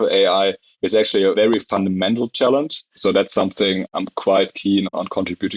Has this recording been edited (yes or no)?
yes